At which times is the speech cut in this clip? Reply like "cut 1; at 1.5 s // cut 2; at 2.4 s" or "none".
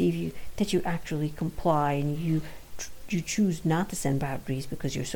none